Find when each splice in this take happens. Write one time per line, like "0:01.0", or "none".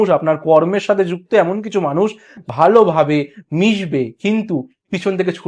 0:02.3